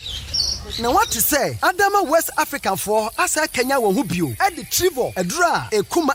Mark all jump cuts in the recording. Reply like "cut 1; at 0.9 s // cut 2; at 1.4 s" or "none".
none